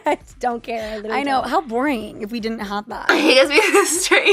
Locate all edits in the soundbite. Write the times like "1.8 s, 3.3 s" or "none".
none